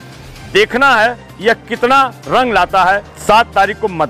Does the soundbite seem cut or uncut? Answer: cut